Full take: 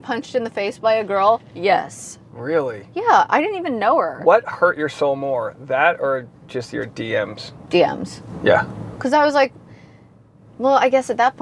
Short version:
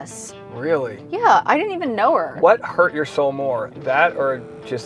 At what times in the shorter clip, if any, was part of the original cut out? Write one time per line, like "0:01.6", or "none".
none